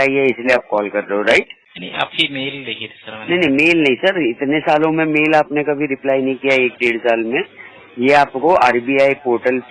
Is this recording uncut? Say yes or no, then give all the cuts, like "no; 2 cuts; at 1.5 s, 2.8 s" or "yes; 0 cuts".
no; 1 cut; at 1.7 s